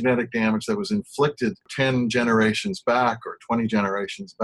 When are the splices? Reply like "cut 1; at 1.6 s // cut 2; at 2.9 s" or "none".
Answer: cut 1; at 1.6 s